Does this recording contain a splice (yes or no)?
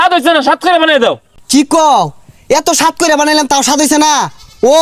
no